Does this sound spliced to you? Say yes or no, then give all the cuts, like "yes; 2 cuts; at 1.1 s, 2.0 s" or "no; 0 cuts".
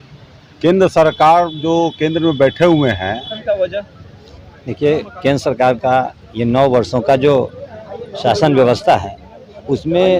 yes; 1 cut; at 3.3 s